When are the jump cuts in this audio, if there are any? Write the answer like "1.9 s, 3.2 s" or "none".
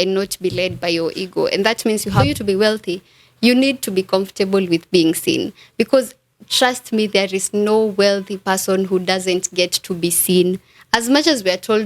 2.2 s